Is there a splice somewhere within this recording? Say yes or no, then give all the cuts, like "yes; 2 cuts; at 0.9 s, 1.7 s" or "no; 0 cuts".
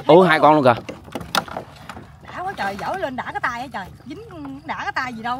no; 0 cuts